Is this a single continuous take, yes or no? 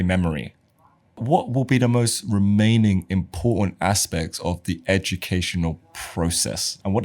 no